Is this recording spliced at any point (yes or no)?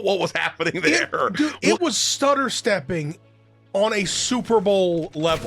yes